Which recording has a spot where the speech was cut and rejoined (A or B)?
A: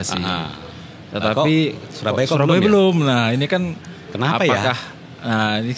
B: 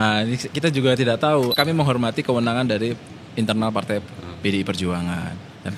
B